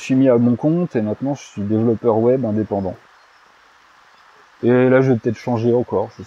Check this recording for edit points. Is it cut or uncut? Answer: uncut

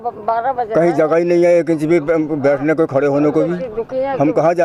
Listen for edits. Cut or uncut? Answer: uncut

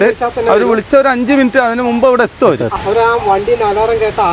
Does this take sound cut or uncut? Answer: cut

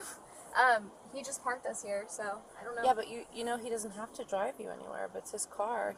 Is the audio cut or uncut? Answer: uncut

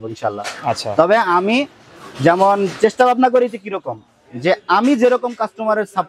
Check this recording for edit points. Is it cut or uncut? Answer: uncut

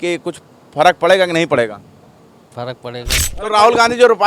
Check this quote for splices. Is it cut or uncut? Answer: cut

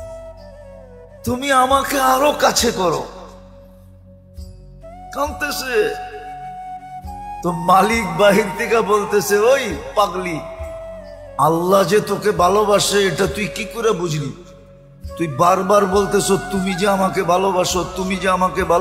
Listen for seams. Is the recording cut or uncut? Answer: cut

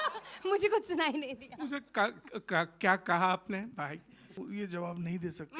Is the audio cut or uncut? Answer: cut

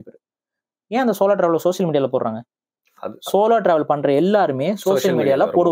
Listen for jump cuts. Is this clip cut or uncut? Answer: uncut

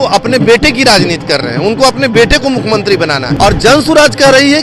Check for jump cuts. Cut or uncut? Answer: cut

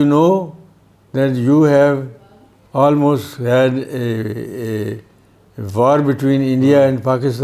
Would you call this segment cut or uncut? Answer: uncut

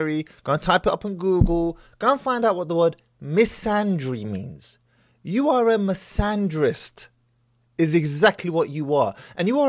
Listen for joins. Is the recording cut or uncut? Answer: uncut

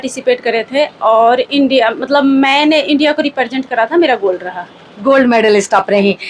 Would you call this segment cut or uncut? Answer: uncut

